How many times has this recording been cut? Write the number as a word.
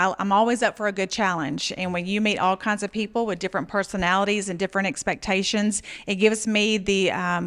zero